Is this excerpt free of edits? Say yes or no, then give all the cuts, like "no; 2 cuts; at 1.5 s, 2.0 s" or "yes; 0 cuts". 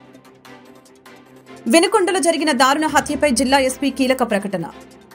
no; 1 cut; at 0.9 s